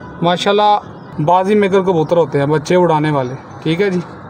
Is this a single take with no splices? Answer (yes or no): no